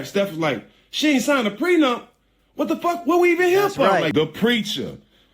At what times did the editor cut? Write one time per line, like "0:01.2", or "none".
0:04.1